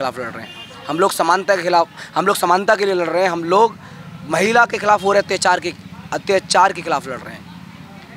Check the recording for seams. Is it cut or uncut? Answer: uncut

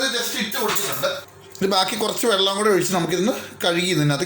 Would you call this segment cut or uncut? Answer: cut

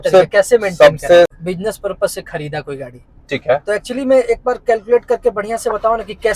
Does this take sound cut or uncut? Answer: cut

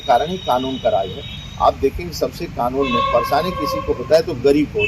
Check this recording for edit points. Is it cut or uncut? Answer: uncut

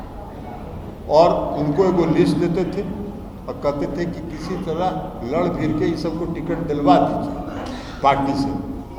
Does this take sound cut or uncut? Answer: uncut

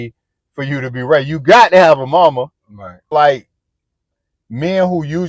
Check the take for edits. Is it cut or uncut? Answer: cut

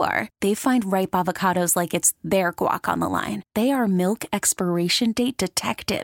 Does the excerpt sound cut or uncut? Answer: uncut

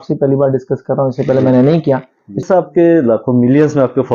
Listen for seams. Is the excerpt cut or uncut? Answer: cut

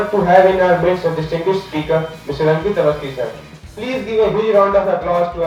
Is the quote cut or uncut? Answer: uncut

